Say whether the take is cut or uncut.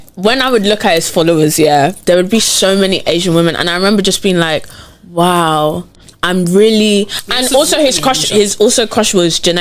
uncut